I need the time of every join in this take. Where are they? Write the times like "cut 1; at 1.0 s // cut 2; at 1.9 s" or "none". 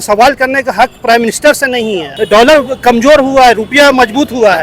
cut 1; at 2.1 s

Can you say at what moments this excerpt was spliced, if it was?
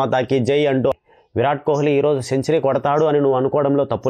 cut 1; at 0.9 s

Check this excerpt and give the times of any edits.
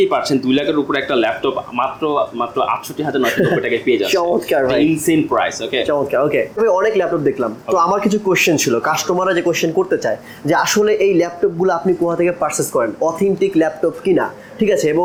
none

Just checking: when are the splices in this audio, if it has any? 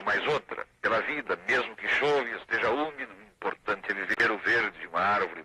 cut 1; at 4.0 s

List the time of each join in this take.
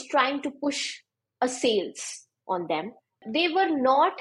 cut 1; at 3.2 s

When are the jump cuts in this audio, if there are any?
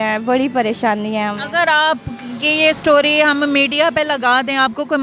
none

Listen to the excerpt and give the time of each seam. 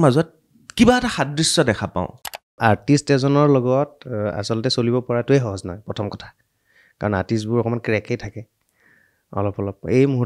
cut 1; at 2.5 s

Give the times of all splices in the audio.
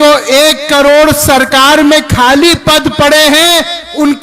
none

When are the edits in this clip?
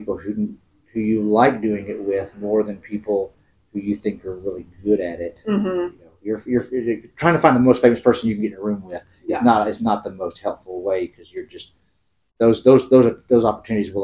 cut 1; at 6.1 s

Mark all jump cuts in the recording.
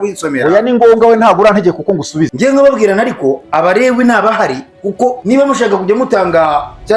cut 1; at 2.3 s // cut 2; at 5.2 s

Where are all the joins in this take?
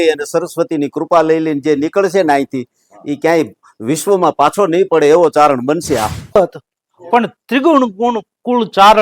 cut 1; at 6.4 s

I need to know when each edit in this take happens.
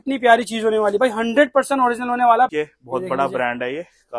cut 1; at 2.5 s

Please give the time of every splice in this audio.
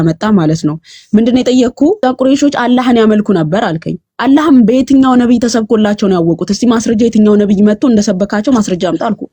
cut 1; at 2.0 s

